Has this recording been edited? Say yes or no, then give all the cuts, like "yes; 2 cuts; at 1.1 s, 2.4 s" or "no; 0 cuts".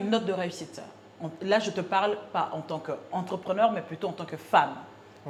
no; 0 cuts